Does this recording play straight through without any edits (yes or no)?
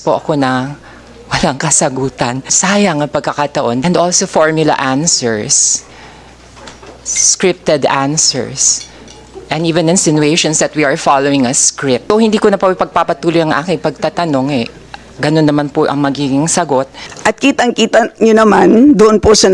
no